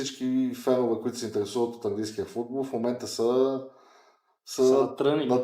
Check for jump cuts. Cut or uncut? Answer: uncut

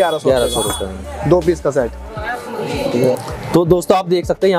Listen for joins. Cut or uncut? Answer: uncut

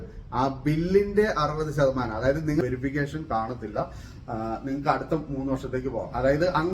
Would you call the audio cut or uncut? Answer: cut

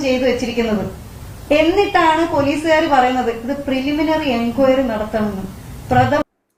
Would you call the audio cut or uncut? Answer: uncut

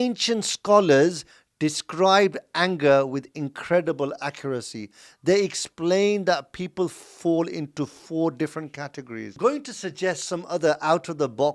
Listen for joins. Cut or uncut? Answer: cut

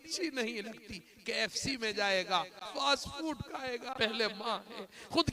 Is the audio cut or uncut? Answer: cut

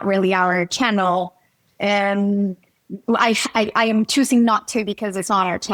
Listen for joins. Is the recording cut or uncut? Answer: uncut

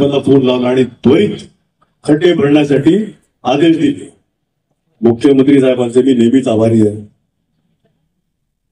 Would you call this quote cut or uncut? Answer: uncut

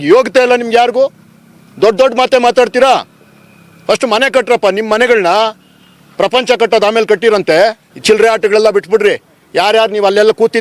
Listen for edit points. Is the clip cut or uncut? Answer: cut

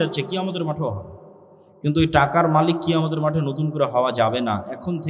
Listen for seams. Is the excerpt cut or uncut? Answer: uncut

